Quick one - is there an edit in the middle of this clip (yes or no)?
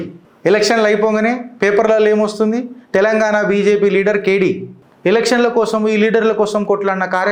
no